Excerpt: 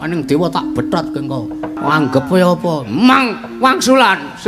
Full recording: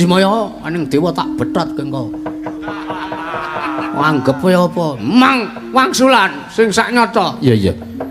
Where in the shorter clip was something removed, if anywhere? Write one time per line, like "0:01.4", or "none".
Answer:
0:01.8